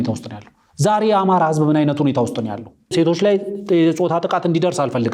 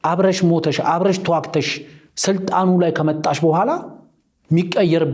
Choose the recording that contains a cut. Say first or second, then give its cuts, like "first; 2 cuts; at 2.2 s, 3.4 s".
first; 1 cut; at 2.8 s